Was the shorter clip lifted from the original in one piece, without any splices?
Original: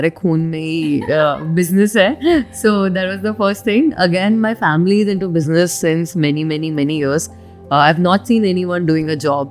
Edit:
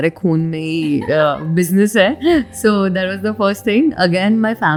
yes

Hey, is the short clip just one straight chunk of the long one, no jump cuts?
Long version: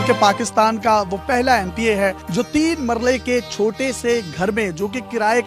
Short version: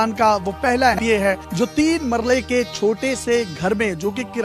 no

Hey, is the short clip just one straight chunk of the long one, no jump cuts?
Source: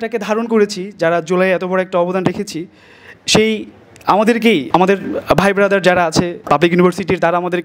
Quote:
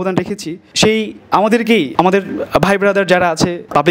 no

